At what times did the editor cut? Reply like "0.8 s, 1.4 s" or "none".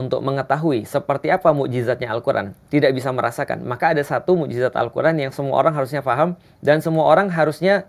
none